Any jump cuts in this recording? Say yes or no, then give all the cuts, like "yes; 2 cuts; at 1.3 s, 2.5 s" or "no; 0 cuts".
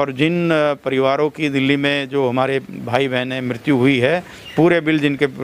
yes; 1 cut; at 4.4 s